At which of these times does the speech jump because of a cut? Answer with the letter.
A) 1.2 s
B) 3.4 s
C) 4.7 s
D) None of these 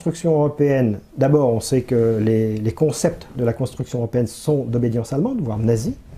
D